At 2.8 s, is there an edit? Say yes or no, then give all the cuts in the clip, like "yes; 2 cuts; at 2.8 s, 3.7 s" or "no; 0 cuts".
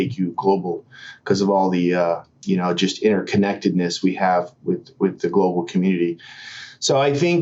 no; 0 cuts